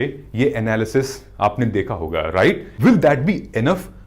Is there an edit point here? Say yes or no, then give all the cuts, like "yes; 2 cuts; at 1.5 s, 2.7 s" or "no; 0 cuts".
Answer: yes; 1 cut; at 2.7 s